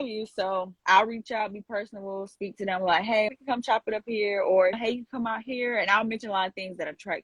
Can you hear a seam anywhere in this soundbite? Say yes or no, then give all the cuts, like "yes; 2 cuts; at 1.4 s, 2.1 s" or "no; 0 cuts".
no; 0 cuts